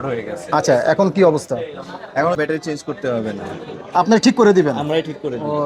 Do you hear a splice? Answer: yes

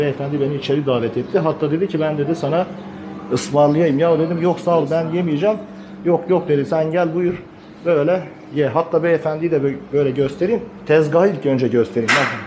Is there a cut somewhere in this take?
no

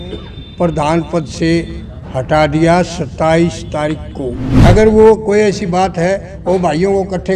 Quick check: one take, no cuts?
no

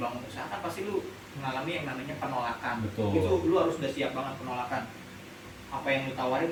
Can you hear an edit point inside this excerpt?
no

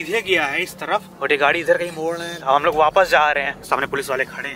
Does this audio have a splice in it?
yes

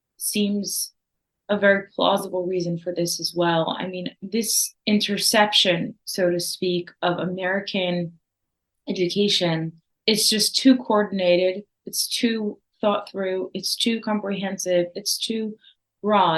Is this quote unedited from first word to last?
no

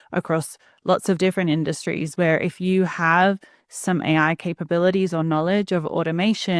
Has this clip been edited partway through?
no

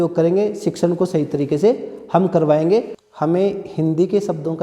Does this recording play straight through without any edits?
no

